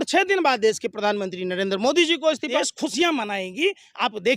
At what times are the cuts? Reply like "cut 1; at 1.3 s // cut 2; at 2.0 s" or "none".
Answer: cut 1; at 2.5 s